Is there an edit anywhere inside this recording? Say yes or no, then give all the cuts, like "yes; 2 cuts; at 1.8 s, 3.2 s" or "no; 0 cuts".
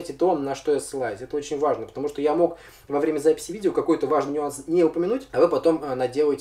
yes; 1 cut; at 5.3 s